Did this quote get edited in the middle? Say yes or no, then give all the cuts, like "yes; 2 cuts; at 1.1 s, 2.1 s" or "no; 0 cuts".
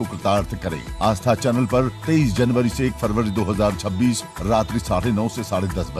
yes; 1 cut; at 1.1 s